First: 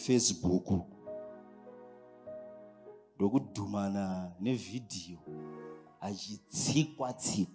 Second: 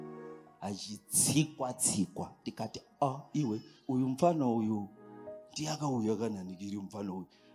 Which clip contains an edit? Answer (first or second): first